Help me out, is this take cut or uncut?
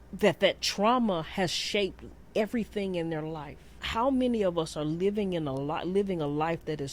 cut